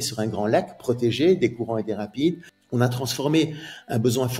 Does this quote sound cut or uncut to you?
cut